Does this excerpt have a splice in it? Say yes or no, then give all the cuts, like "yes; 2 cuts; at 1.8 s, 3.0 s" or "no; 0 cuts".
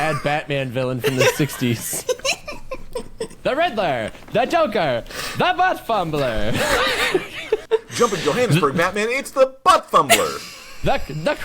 yes; 1 cut; at 7.6 s